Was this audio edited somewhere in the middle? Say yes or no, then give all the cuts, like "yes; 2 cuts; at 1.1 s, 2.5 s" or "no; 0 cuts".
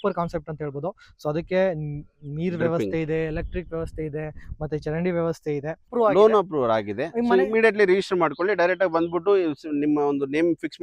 yes; 1 cut; at 5.9 s